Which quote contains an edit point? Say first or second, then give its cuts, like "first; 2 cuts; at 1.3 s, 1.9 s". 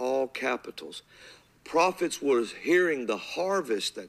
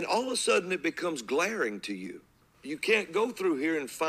second; 1 cut; at 2.4 s